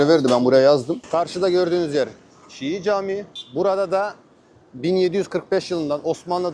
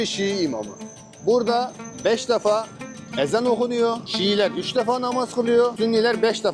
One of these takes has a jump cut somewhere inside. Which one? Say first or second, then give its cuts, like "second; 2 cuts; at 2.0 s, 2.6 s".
first; 2 cuts; at 0.9 s, 3.4 s